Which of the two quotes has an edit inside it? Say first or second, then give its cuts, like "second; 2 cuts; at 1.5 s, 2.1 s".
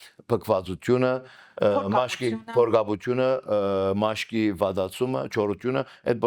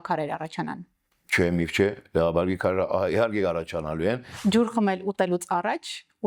second; 1 cut; at 4.3 s